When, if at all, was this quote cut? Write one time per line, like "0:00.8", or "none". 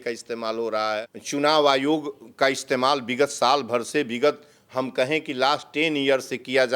0:01.2